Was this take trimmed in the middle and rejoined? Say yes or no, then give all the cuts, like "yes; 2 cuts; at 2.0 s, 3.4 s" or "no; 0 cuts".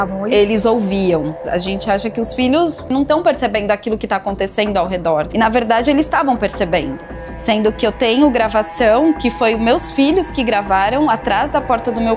yes; 2 cuts; at 1.4 s, 2.9 s